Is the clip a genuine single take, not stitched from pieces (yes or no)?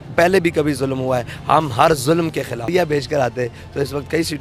no